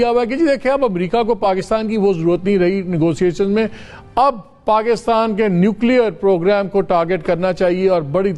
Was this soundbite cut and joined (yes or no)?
no